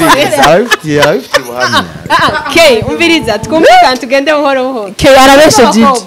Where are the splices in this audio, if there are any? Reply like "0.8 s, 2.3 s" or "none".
none